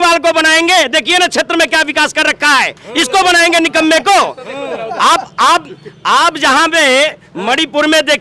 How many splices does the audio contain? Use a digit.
0